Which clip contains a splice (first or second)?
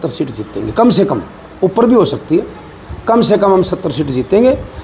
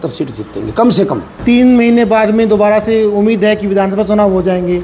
second